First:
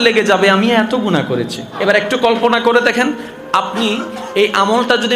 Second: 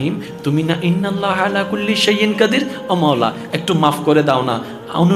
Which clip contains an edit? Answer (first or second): first